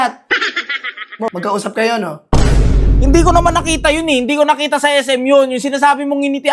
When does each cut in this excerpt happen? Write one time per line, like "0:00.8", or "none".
0:01.3